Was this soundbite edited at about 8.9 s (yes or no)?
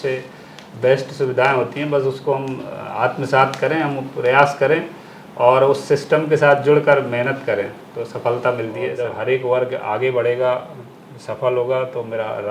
yes